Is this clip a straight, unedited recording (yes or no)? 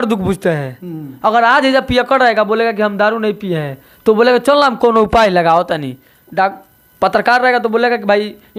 yes